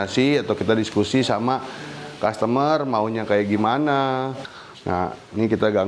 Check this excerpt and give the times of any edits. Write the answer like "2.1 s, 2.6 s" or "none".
4.4 s